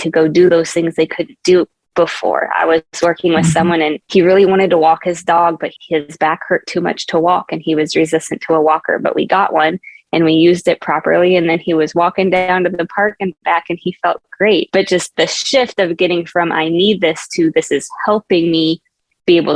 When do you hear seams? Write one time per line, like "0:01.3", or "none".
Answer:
0:04.0
0:15.1

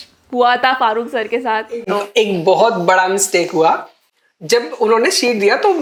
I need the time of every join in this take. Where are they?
none

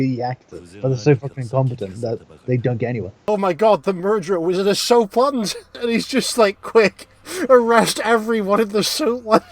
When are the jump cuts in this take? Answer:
0:01.0
0:03.2
0:05.8

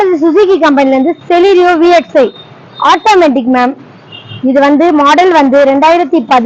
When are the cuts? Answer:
none

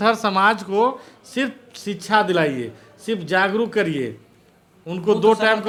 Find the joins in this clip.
none

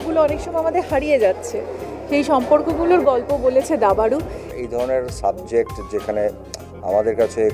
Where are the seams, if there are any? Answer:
0:04.5

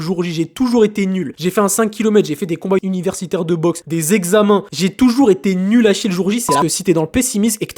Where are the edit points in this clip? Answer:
0:01.3
0:02.8
0:03.8
0:04.7
0:06.6

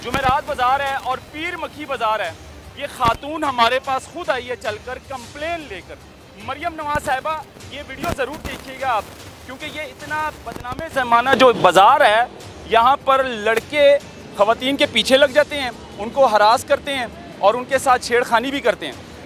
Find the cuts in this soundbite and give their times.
none

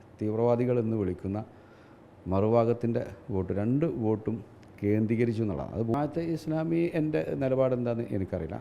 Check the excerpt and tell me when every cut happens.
0:05.9

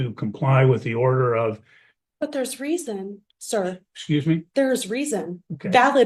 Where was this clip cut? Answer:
none

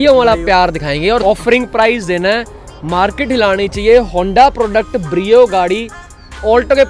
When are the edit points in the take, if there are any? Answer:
0:01.2

